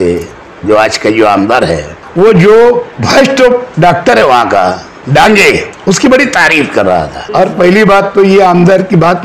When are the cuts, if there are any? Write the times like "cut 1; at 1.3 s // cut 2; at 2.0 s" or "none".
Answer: cut 1; at 2.0 s // cut 2; at 4.9 s // cut 3; at 5.7 s // cut 4; at 7.2 s

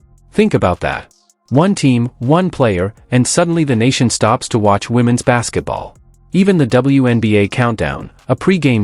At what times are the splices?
none

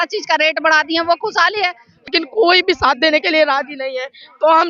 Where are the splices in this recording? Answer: cut 1; at 2.1 s

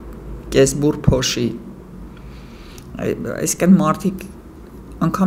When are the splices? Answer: none

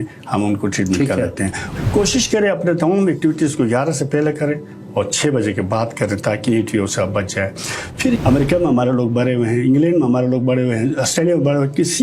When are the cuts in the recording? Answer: cut 1; at 1.6 s // cut 2; at 8.2 s

